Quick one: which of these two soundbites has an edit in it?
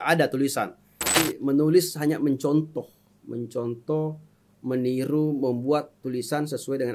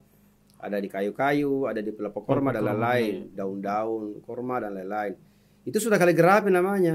first; 1 cut; at 1.2 s

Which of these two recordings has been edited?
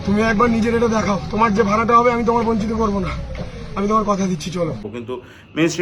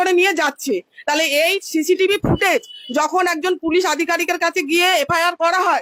first; 1 cut; at 4.9 s

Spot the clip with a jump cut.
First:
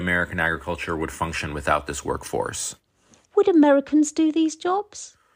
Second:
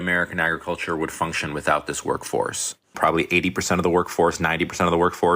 second; 1 cut; at 3.0 s

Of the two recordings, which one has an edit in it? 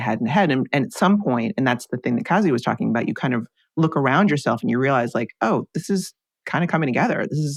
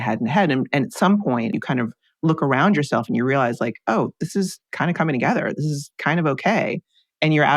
second; 2 cuts; at 1.5 s, 4.6 s

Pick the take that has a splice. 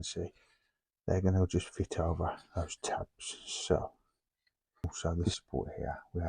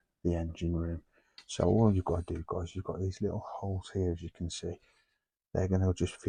first; 1 cut; at 4.8 s

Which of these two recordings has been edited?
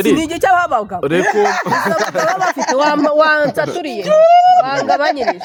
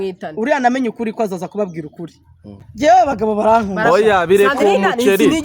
second; 1 cut; at 2.7 s

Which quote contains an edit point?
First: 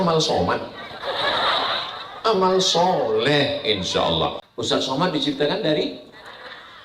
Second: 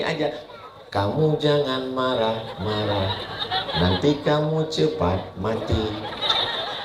first; 1 cut; at 4.5 s

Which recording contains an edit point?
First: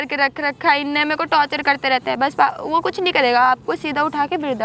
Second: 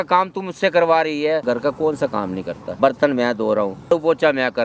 second; 3 cuts; at 1.4 s, 2.6 s, 3.9 s

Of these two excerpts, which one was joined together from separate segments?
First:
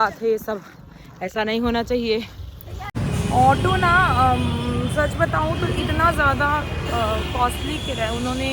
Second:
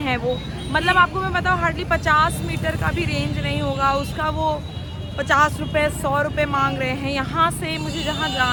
first; 1 cut; at 2.9 s

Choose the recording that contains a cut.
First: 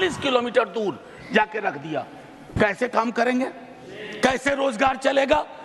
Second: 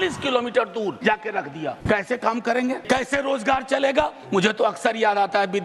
second; 3 cuts; at 1.3 s, 2.8 s, 4.2 s

